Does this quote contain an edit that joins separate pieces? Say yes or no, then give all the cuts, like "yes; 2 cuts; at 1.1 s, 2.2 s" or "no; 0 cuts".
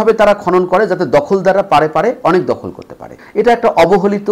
yes; 1 cut; at 3.2 s